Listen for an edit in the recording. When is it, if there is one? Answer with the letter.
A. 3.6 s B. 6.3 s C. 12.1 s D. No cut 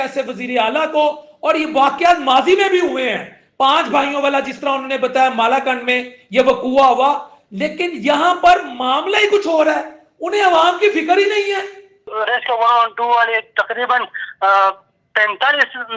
C